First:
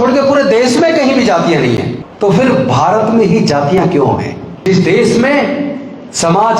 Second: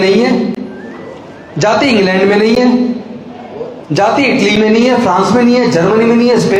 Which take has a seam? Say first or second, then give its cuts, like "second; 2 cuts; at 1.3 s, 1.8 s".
first; 2 cuts; at 2.0 s, 4.6 s